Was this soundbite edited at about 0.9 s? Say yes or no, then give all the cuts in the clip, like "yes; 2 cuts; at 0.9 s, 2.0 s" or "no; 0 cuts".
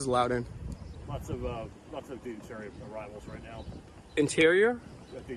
yes; 1 cut; at 0.9 s